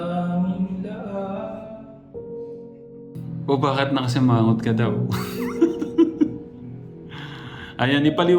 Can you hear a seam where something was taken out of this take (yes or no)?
yes